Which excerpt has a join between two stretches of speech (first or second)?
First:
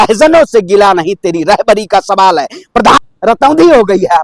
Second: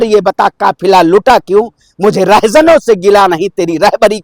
first